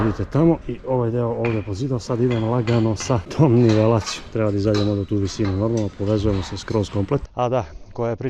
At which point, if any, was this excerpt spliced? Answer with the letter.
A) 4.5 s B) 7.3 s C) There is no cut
B